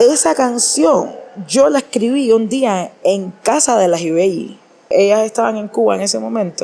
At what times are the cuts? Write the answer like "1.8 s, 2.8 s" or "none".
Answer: 4.9 s